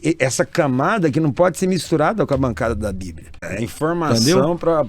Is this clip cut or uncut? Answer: cut